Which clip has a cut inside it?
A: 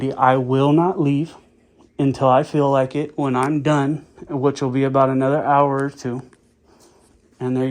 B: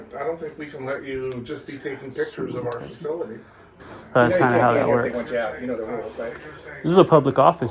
B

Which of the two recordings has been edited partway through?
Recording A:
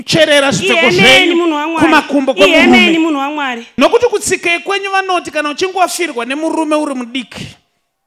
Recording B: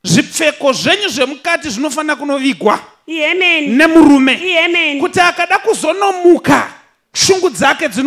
A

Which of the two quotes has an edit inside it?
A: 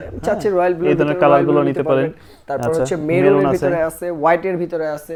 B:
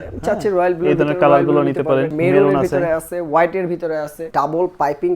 B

